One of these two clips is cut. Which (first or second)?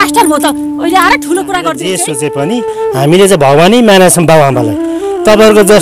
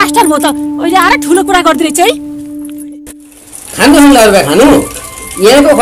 first